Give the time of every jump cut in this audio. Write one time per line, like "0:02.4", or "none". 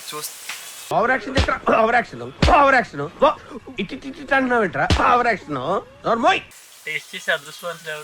0:06.6